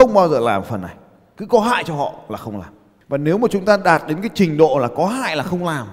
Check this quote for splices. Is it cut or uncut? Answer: uncut